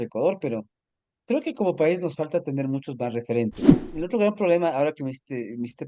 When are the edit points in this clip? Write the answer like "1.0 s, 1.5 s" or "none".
3.6 s

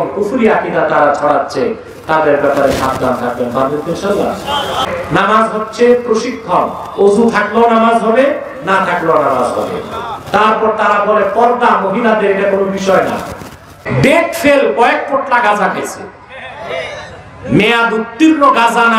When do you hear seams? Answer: 4.8 s, 13.8 s

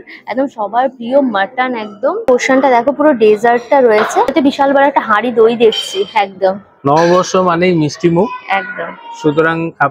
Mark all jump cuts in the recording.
none

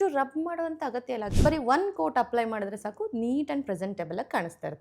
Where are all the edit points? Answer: 1.3 s

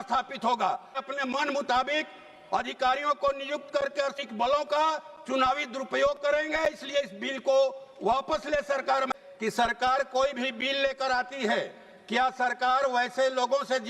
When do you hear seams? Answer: 1.0 s, 4.1 s, 9.1 s

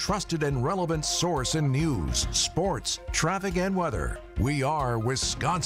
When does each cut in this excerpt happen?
4.2 s

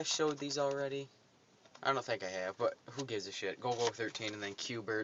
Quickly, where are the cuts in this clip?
none

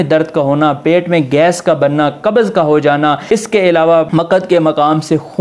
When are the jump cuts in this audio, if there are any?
3.2 s, 4.1 s

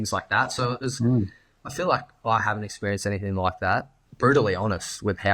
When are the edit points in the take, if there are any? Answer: 4.0 s

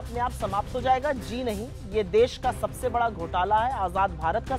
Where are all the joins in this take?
none

